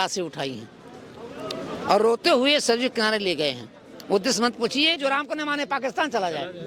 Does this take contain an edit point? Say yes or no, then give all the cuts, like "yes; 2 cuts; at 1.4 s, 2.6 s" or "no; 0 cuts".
yes; 1 cut; at 5.0 s